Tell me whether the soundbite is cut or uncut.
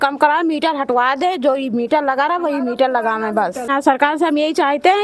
cut